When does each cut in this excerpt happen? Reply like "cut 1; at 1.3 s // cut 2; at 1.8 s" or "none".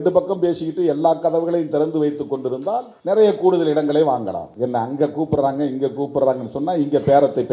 cut 1; at 2.9 s // cut 2; at 4.5 s